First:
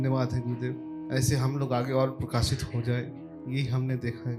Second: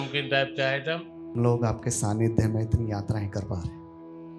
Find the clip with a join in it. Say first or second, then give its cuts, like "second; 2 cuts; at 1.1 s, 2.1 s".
second; 1 cut; at 1.3 s